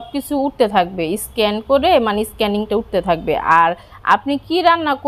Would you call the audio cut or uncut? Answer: uncut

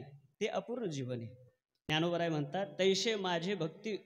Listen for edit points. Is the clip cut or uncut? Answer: cut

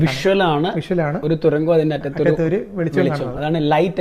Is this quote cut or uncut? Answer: uncut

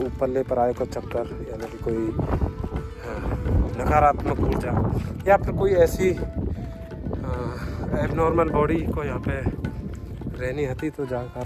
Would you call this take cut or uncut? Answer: uncut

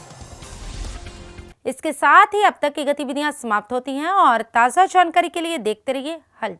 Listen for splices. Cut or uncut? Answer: uncut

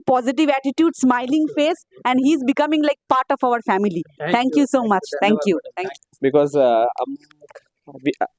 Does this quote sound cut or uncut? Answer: uncut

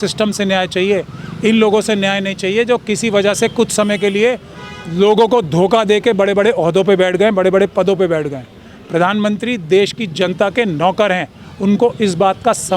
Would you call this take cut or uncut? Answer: uncut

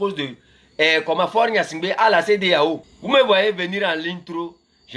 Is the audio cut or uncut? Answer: cut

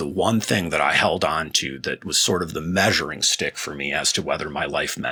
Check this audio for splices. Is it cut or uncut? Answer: uncut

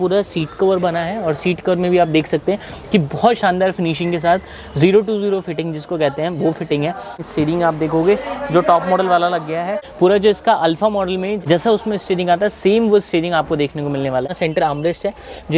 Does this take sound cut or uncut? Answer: cut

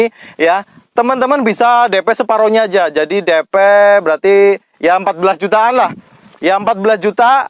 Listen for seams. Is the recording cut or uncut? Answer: uncut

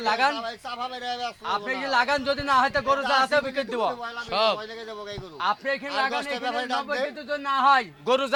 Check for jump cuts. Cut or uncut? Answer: uncut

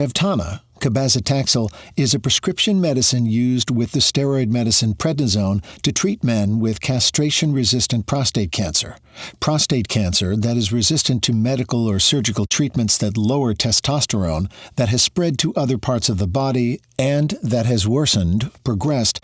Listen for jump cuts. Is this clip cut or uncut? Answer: uncut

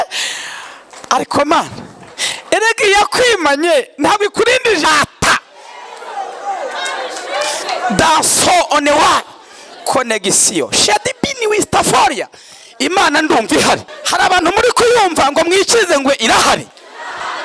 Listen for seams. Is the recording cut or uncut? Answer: cut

